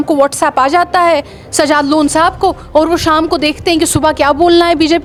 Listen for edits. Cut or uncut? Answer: uncut